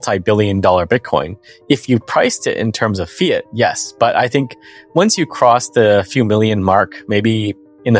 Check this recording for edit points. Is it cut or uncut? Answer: uncut